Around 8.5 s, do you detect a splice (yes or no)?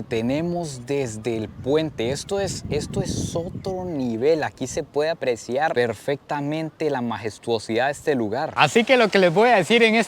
yes